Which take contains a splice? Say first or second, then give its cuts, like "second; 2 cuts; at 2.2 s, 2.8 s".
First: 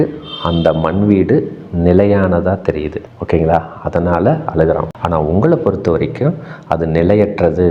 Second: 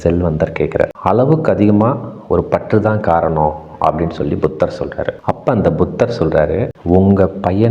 second; 2 cuts; at 0.9 s, 5.1 s